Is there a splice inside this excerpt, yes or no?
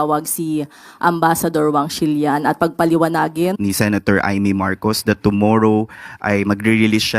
yes